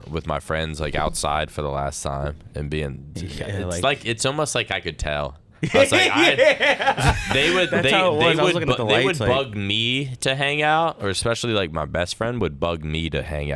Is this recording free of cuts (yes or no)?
yes